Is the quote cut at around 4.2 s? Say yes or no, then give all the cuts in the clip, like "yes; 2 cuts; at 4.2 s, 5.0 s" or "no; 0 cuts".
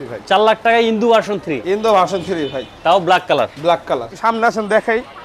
yes; 1 cut; at 4.2 s